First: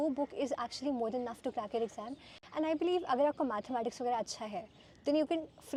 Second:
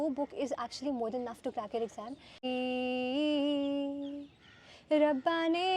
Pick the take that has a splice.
second; 1 cut; at 2.4 s

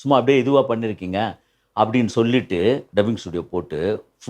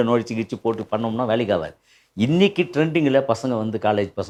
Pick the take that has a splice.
first; 1 cut; at 2.8 s

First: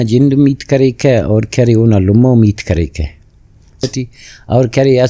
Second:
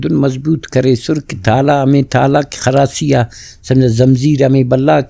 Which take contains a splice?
first; 1 cut; at 3.8 s

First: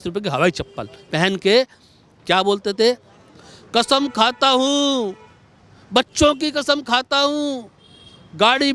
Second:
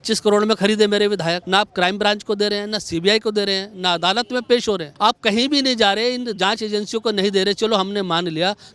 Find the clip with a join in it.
second; 2 cuts; at 1.4 s, 4.9 s

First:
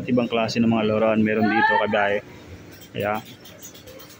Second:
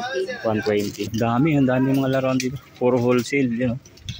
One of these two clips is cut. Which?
second; 1 cut; at 1.0 s

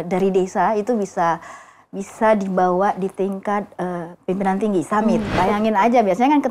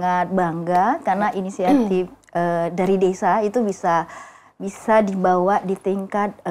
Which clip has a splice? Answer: first; 1 cut; at 5.3 s

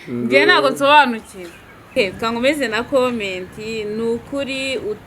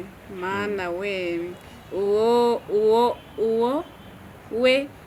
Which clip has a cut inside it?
first; 1 cut; at 1.9 s

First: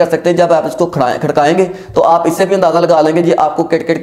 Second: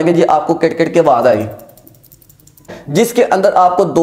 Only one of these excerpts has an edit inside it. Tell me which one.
second; 1 cut; at 2.7 s

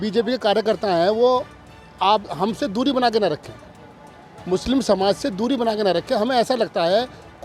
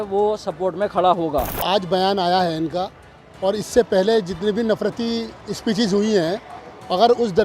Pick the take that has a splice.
second; 1 cut; at 1.6 s

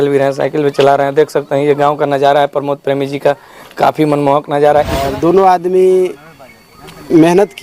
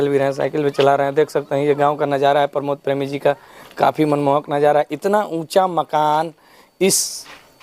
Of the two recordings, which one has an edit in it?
first; 1 cut; at 5.0 s

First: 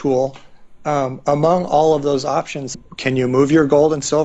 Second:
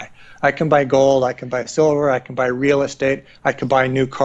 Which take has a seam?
first; 1 cut; at 2.7 s

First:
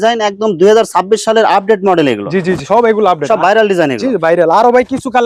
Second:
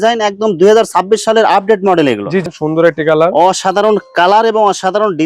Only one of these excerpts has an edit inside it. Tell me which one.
second; 1 cut; at 2.4 s

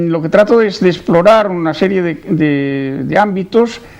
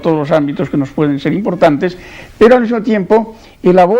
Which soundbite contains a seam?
first; 1 cut; at 1.0 s

